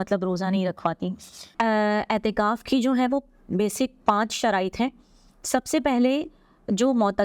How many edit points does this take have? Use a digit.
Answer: 1